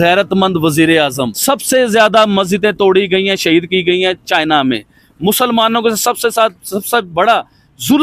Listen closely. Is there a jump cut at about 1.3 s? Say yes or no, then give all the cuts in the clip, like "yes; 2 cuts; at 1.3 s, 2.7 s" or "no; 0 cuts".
yes; 1 cut; at 1.3 s